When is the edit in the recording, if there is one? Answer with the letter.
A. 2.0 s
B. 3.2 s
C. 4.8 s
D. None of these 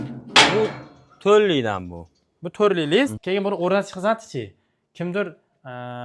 B